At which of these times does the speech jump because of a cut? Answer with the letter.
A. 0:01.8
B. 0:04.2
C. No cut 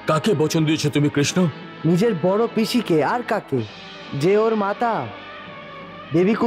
C